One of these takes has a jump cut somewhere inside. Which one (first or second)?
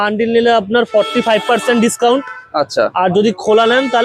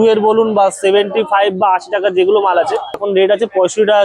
second